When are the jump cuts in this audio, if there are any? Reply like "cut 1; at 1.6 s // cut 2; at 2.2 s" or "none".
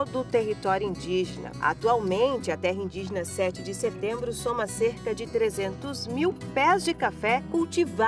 none